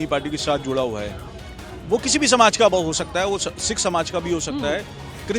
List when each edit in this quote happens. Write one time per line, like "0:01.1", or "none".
none